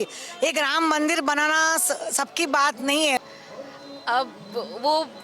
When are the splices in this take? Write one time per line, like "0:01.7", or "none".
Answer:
0:03.2